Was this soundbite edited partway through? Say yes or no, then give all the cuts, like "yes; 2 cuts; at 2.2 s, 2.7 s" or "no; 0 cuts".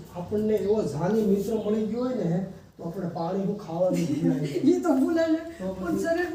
no; 0 cuts